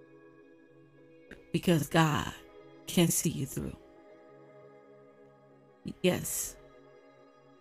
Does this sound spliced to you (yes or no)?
no